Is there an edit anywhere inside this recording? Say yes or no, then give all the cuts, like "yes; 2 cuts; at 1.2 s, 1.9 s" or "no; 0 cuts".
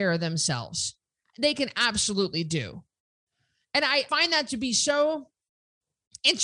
yes; 2 cuts; at 1.2 s, 4.1 s